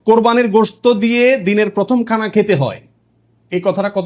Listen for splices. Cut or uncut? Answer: uncut